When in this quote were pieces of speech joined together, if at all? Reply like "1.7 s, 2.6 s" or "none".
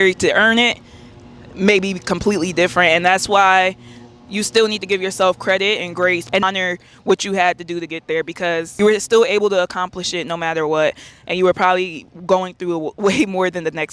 none

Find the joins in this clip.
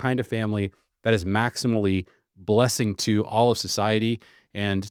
none

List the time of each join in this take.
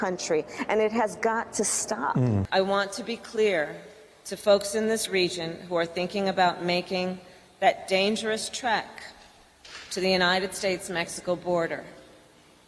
2.5 s

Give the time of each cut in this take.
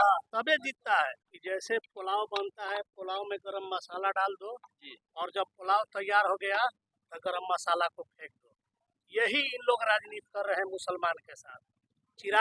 1.2 s

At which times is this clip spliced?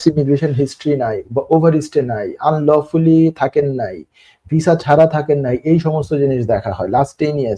none

